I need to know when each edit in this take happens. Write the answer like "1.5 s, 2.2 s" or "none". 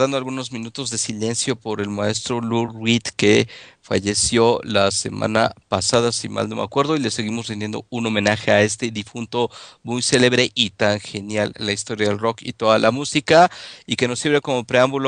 13.2 s